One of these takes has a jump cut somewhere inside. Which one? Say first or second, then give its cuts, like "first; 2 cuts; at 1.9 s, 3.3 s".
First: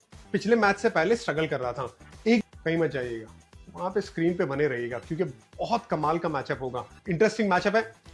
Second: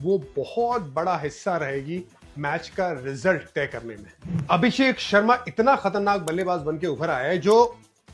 first; 2 cuts; at 2.4 s, 6.9 s